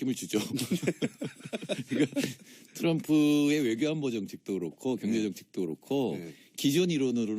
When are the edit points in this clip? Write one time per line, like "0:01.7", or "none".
0:04.0